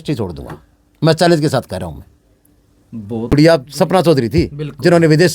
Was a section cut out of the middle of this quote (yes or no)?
yes